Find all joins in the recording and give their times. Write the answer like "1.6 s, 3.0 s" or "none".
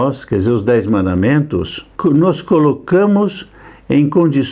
1.9 s